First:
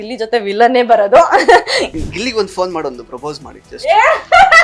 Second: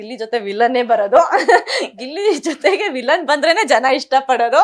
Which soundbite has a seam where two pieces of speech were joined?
first; 1 cut; at 2.0 s

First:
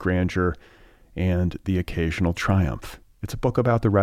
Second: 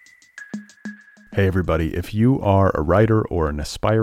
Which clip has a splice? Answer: second; 1 cut; at 0.9 s

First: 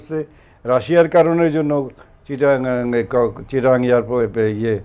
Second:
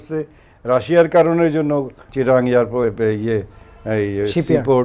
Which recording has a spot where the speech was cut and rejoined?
second; 1 cut; at 2.1 s

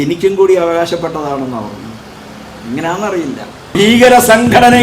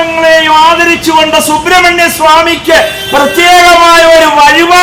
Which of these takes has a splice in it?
first; 1 cut; at 3.7 s

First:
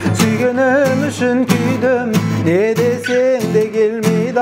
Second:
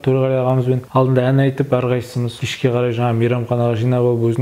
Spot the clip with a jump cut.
second; 2 cuts; at 0.8 s, 2.2 s

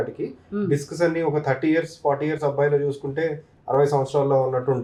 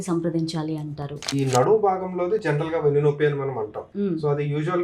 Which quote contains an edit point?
second; 2 cuts; at 1.3 s, 3.8 s

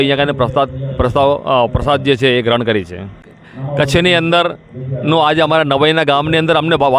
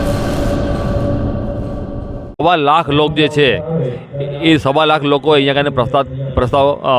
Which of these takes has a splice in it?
second; 1 cut; at 2.4 s

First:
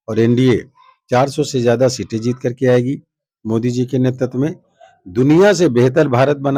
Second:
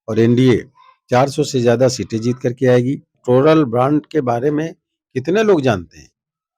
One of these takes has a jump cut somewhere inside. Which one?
second; 1 cut; at 3.2 s

